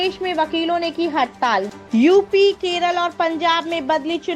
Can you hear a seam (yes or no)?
yes